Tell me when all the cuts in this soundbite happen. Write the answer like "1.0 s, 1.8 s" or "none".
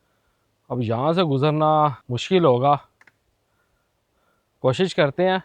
2.1 s

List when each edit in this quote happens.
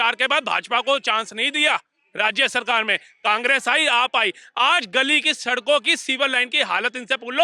none

